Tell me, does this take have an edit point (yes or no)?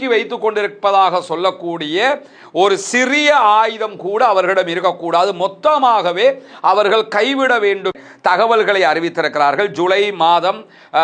yes